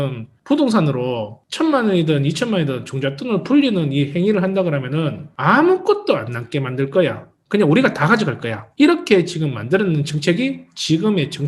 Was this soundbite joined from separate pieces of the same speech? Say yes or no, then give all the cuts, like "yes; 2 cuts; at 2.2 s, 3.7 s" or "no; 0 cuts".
no; 0 cuts